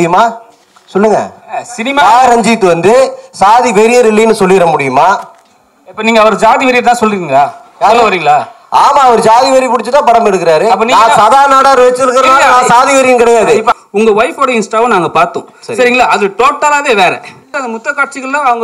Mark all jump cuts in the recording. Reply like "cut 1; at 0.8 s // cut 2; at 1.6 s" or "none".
cut 1; at 13.7 s // cut 2; at 17.6 s